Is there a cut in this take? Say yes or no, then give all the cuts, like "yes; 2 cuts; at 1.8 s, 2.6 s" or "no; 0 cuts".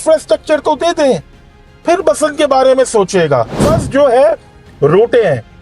yes; 1 cut; at 3.5 s